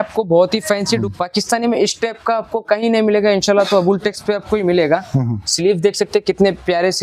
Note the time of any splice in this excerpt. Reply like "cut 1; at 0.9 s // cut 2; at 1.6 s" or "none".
cut 1; at 1.0 s